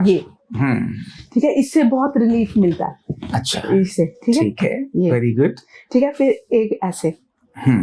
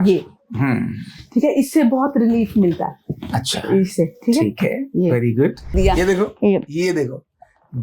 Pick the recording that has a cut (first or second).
second